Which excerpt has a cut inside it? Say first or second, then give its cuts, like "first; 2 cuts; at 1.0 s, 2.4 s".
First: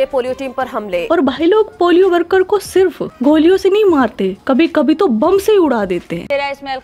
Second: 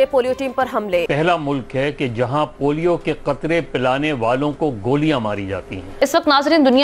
second; 2 cuts; at 1.0 s, 5.9 s